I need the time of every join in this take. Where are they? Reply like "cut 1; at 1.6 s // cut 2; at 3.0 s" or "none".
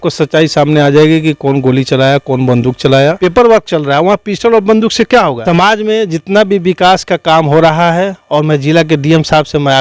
cut 1; at 3.2 s // cut 2; at 5.4 s